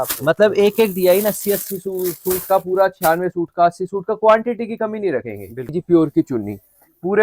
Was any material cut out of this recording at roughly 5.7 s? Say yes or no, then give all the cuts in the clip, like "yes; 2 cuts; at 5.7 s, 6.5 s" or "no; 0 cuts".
yes; 1 cut; at 5.7 s